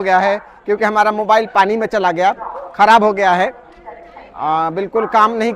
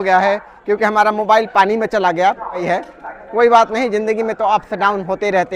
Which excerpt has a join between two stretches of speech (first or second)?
second